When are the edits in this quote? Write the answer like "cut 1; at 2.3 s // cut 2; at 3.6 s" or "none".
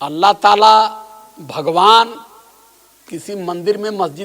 none